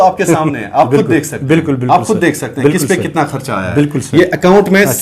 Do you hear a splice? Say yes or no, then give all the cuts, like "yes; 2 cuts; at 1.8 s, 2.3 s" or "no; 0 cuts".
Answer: no; 0 cuts